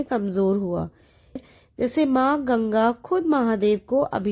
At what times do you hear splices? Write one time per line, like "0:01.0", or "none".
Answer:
0:01.4

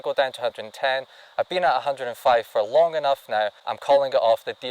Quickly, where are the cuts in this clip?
0:03.7

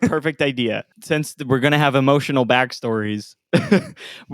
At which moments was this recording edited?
0:00.9

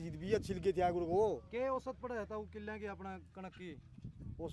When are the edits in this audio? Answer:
none

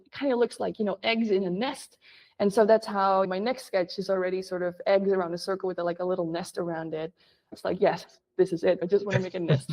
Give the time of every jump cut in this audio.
0:07.5
0:08.8

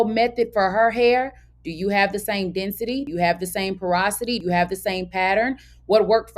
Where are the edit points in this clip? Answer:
0:03.1
0:04.4

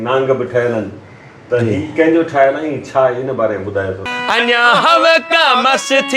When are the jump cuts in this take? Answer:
0:04.1

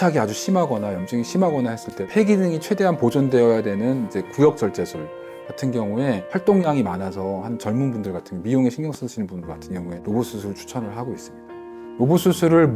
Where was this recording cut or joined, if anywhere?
0:02.1
0:06.2
0:09.9

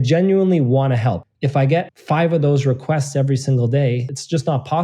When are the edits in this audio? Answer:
0:01.2

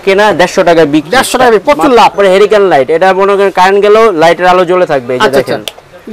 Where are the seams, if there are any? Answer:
0:02.1

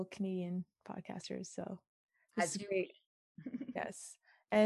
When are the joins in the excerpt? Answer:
none

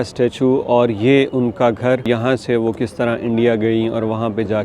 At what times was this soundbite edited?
0:02.0

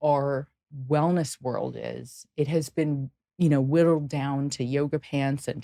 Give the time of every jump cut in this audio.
none

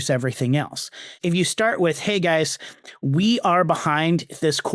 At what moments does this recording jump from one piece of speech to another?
0:01.1

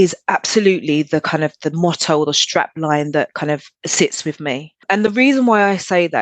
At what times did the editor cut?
0:03.7
0:04.8

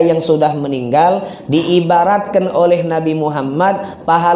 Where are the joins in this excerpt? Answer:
none

